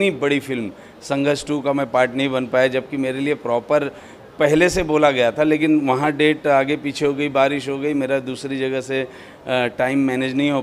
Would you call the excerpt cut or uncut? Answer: uncut